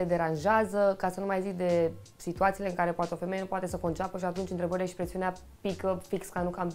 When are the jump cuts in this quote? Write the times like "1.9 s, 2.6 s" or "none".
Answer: none